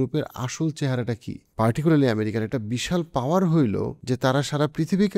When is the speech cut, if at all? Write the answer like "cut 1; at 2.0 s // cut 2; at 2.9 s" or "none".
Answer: cut 1; at 1.4 s // cut 2; at 3.9 s